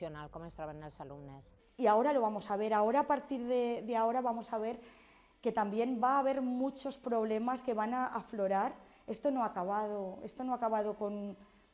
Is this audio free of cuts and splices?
no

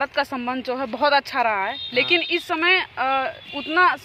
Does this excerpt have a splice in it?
no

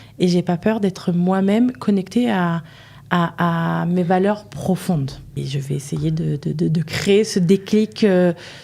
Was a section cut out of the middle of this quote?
yes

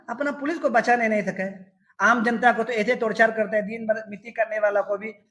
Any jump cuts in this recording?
no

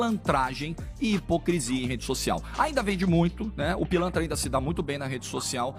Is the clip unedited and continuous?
yes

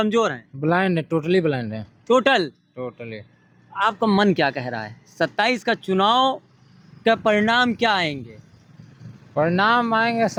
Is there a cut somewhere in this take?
no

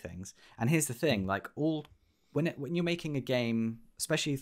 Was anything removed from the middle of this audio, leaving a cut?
no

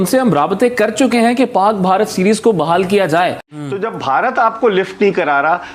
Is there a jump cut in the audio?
yes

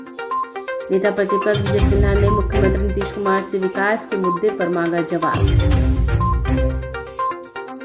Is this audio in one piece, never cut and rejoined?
yes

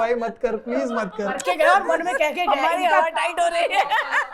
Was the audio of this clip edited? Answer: no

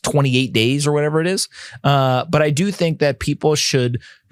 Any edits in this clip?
no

